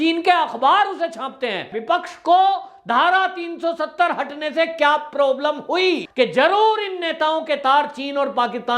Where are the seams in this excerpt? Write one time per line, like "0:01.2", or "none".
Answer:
0:01.8
0:06.1